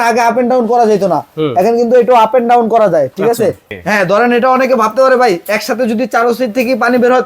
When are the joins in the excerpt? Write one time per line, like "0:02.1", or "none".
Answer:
0:03.7

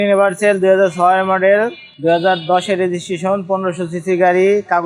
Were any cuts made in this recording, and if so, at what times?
0:01.8

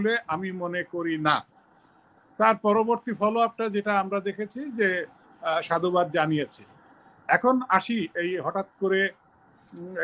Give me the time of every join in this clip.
none

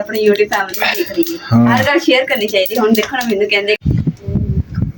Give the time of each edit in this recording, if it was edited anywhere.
0:03.8

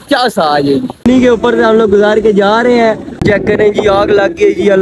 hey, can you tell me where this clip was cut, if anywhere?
0:01.0
0:03.2

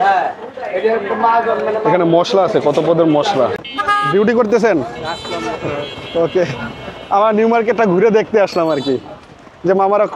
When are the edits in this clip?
0:03.7

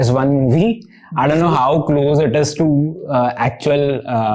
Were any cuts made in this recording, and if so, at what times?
none

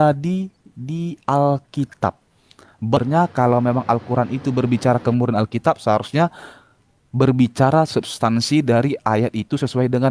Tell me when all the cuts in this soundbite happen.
0:03.0

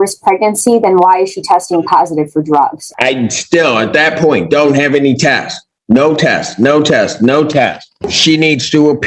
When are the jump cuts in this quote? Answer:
0:02.8
0:07.9

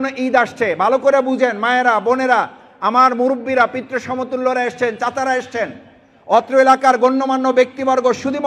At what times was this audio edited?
none

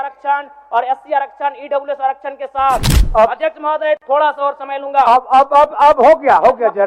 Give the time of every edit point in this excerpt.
0:03.0

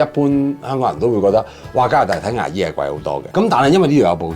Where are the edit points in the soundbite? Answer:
0:03.2

